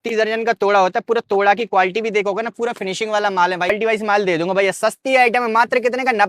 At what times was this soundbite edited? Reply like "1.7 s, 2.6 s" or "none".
3.7 s